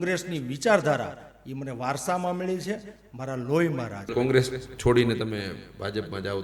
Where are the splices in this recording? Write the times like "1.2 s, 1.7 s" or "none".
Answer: 4.0 s

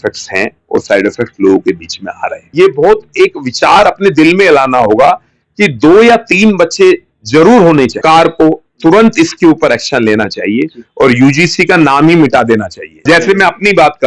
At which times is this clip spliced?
2.5 s, 8.0 s, 13.0 s

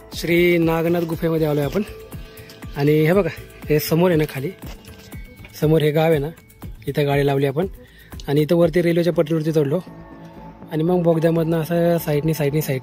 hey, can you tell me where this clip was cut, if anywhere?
none

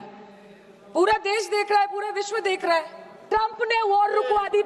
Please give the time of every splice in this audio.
3.2 s

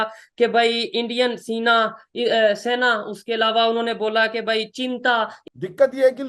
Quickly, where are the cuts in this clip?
5.4 s

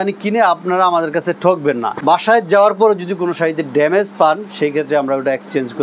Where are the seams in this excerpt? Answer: 1.9 s

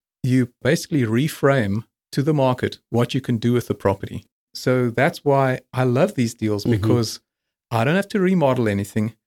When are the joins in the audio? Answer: 4.5 s

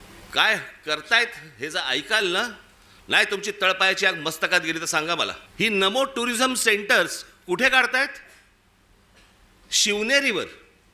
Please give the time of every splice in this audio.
5.4 s

